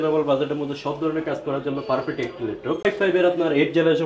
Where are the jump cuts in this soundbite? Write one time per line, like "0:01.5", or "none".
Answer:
0:02.8